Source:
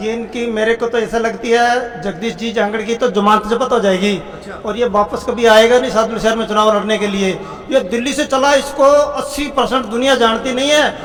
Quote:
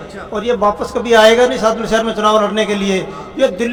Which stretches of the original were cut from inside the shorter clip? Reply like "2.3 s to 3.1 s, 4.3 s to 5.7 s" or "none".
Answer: none